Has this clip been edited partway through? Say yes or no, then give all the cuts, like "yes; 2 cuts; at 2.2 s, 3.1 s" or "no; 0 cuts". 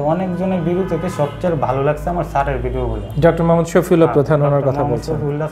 no; 0 cuts